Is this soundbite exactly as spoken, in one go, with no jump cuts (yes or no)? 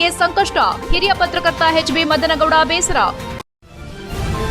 no